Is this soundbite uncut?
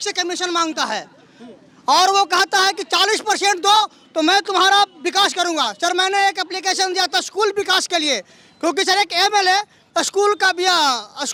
yes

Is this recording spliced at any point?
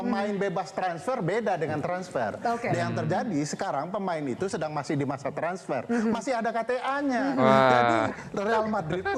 no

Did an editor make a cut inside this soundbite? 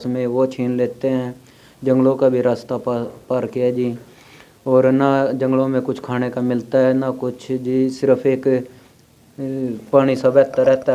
no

